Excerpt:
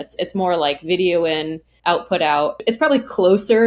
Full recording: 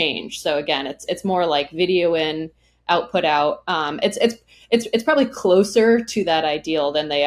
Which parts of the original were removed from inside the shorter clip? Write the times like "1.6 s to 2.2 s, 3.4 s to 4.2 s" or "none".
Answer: 2.5 s to 2.7 s, 3.6 s to 4.9 s